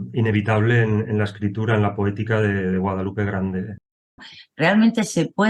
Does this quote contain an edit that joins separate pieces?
yes; 1 cut; at 4.2 s

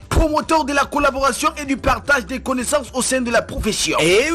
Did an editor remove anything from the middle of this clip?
yes; 1 cut; at 2.4 s

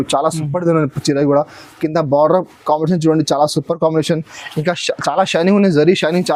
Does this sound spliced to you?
no; 0 cuts

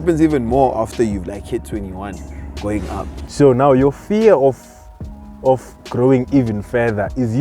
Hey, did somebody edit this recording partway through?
yes; 1 cut; at 3.2 s

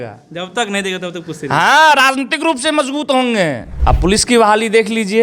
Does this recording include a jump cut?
yes; 1 cut; at 3.7 s

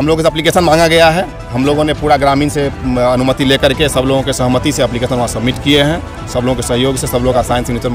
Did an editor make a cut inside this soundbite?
no; 0 cuts

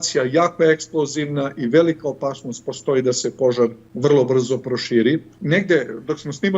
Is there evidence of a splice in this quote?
yes; 2 cuts; at 3.8 s, 5.3 s

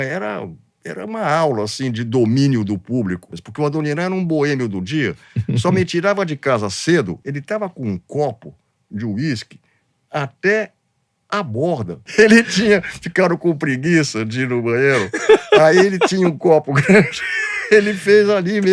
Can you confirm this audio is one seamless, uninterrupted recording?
no; 3 cuts; at 3.3 s, 7.2 s, 12.0 s

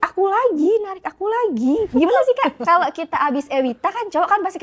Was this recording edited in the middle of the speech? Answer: yes; 1 cut; at 1.9 s

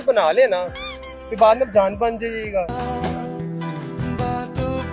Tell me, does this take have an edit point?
no; 0 cuts

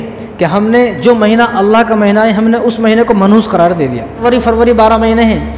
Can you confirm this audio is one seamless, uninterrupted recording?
no; 1 cut; at 4.2 s

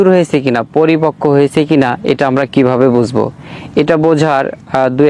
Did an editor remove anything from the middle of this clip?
no; 0 cuts

